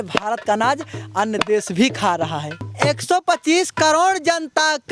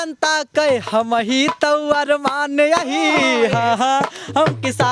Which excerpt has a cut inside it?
first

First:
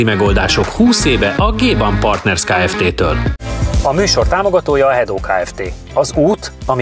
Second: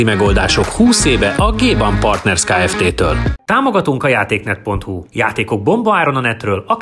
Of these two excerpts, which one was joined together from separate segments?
second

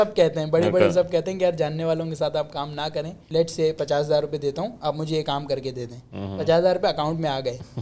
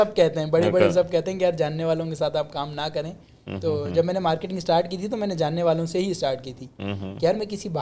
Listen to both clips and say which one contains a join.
first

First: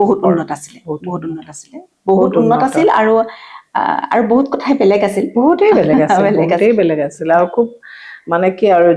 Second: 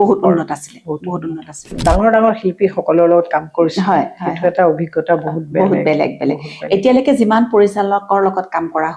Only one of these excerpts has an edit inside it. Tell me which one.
second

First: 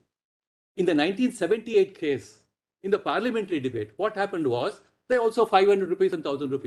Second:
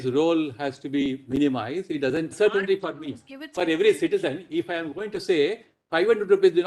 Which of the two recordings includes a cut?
second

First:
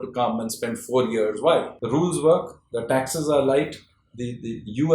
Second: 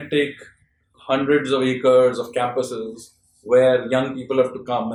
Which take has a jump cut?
first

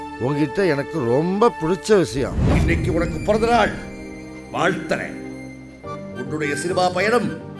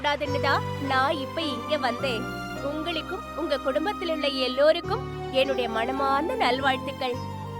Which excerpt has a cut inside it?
first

